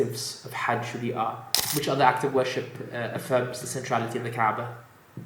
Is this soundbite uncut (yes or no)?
no